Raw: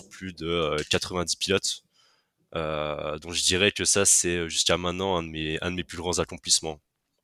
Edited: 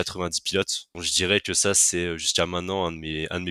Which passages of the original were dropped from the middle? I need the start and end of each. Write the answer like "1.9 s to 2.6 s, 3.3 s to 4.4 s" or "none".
2.0 s to 3.3 s